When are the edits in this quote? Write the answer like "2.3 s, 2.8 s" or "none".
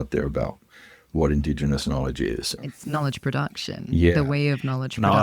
2.5 s